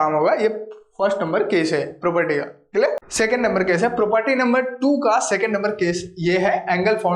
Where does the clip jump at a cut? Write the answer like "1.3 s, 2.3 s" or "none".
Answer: 3.1 s

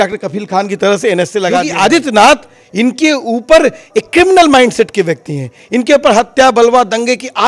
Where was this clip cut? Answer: 1.7 s

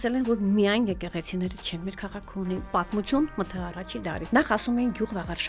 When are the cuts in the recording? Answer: 2.7 s, 4.2 s

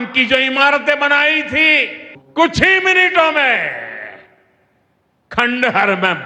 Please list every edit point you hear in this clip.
2.1 s

